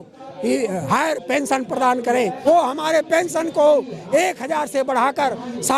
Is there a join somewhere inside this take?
yes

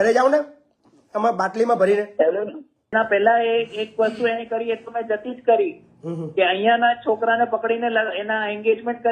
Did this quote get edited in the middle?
yes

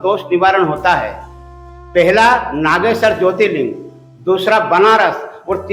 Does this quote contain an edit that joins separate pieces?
no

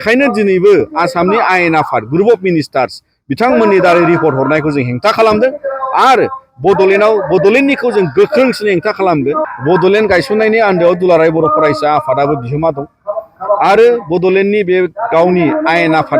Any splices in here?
yes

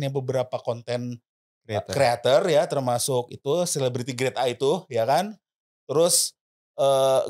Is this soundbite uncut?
yes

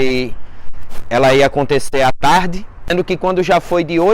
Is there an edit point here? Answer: yes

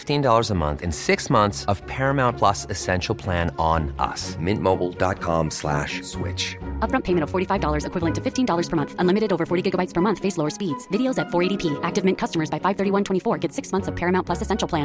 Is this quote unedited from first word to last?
yes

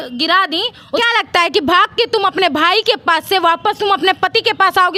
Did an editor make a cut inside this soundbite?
no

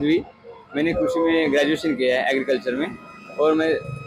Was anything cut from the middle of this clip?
no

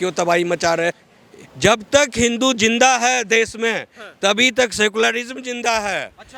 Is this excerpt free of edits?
no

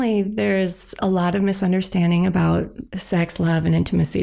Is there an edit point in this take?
yes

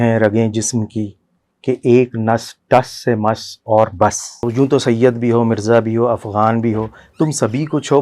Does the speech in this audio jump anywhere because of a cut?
yes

